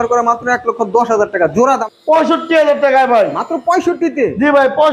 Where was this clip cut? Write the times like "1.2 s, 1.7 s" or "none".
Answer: 1.8 s